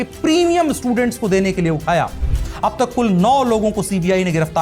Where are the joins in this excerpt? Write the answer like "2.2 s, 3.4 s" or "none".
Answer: 2.2 s